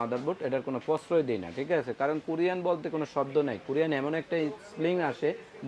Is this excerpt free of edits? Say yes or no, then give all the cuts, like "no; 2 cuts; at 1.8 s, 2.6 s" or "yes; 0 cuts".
yes; 0 cuts